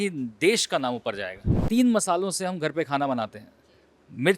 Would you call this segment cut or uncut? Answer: cut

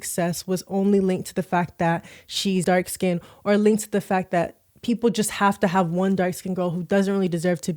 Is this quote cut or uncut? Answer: cut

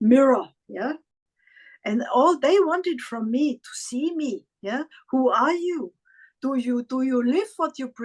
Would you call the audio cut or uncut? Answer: cut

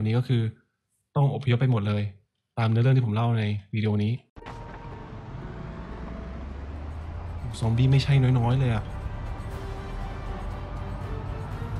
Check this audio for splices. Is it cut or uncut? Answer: uncut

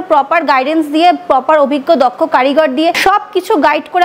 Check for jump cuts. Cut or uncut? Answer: cut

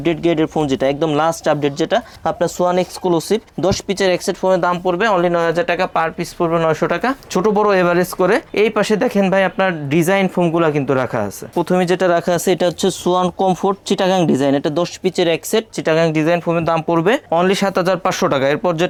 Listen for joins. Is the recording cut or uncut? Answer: uncut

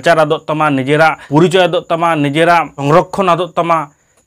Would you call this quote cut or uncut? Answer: cut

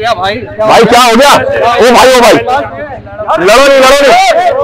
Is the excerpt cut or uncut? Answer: uncut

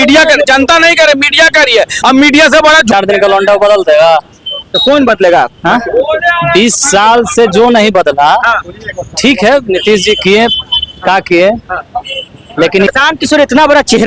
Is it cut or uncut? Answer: cut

